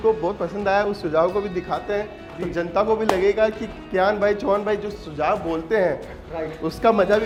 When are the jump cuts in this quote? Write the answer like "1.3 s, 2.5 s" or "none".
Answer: none